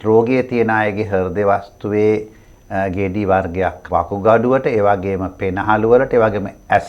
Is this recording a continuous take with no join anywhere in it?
no; 1 cut; at 3.8 s

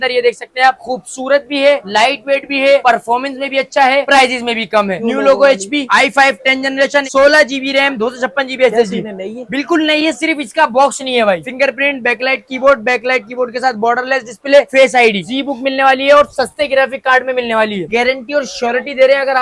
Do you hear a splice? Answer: yes; 5 cuts; at 0.8 s, 5.0 s, 11.5 s, 15.2 s, 17.8 s

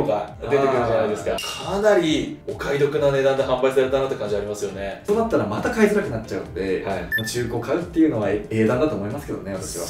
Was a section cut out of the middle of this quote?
yes; 3 cuts; at 1.4 s, 4.9 s, 7.1 s

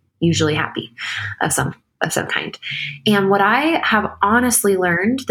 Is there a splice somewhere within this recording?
no; 0 cuts

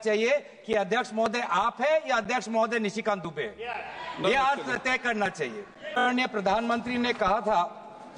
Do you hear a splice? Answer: yes; 1 cut; at 6.2 s

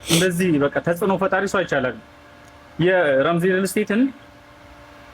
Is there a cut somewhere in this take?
no; 0 cuts

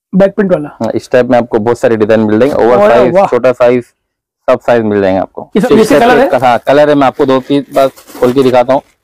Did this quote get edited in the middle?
yes; 1 cut; at 5.4 s

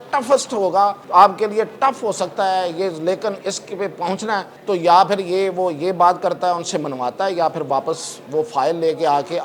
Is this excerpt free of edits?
no; 2 cuts; at 1.0 s, 4.5 s

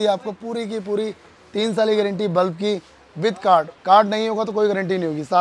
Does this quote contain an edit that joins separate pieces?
no; 0 cuts

